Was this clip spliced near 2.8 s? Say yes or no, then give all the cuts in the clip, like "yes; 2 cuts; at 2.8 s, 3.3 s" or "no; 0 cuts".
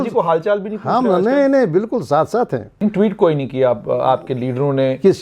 yes; 1 cut; at 2.8 s